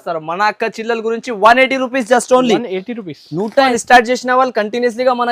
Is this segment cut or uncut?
cut